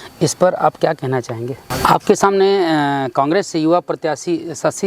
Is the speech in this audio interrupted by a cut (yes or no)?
yes